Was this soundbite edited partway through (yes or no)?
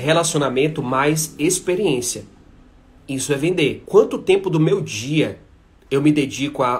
yes